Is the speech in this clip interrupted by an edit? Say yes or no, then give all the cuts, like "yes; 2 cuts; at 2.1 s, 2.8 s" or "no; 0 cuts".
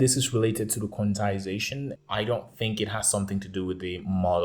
yes; 1 cut; at 1.9 s